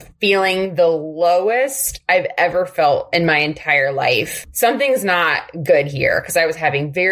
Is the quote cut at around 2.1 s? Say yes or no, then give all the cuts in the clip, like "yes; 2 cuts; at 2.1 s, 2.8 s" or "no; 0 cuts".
no; 1 cut; at 4.4 s